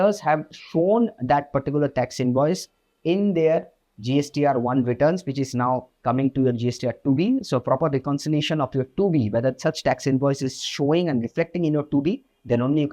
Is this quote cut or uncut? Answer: uncut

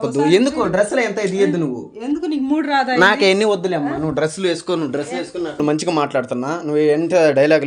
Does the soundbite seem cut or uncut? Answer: uncut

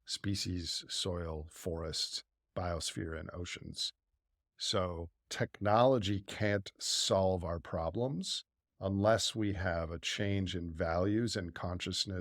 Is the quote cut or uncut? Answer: cut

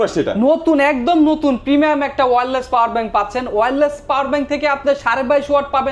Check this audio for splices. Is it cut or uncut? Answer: uncut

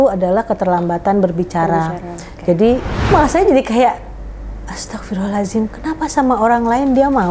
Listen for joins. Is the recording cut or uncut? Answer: cut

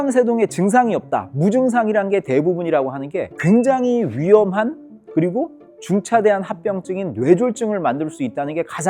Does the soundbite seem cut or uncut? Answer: uncut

